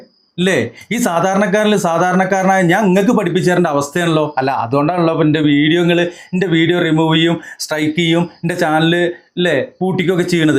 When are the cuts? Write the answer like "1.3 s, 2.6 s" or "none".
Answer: none